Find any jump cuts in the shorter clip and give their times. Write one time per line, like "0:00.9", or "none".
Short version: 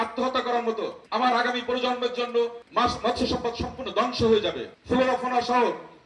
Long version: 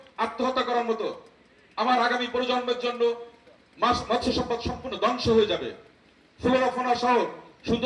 0:01.0
0:02.6
0:04.7